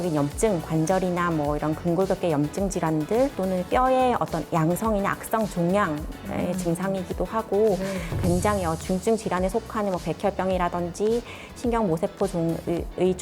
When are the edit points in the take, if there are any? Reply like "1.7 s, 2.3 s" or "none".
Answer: 8.1 s